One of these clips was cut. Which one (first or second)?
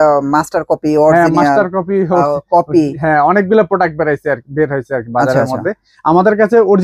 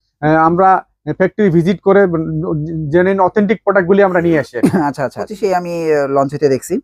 second